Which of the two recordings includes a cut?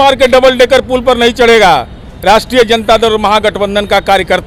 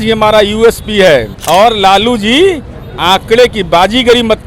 second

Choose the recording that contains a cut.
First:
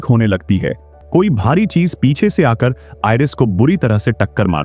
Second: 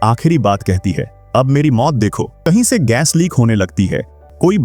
second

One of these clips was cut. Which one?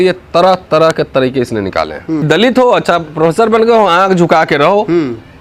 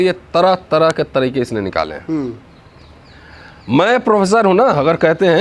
first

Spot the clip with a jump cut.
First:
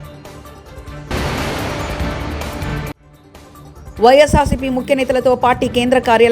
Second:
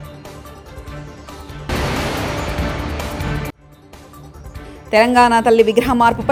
first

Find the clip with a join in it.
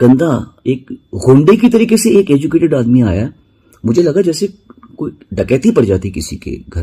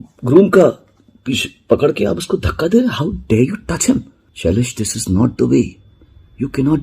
second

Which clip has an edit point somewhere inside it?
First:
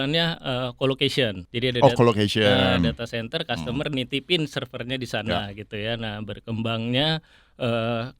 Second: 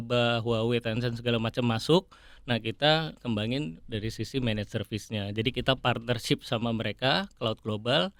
first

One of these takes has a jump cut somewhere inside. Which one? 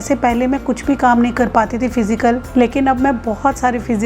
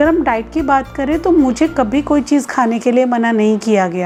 first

